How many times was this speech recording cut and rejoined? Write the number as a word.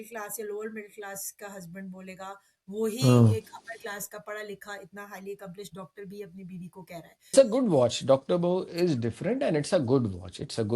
one